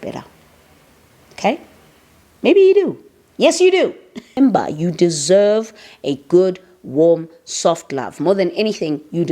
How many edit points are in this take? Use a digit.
1